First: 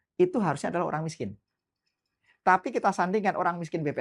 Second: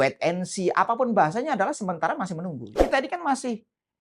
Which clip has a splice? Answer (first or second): second